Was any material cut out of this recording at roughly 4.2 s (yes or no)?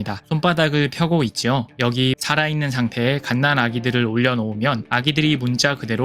no